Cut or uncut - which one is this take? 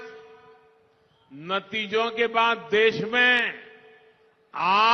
uncut